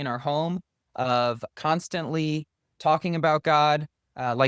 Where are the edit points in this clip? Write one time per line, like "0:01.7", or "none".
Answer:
0:01.5